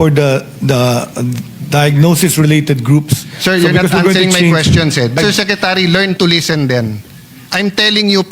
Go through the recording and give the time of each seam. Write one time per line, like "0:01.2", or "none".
0:05.2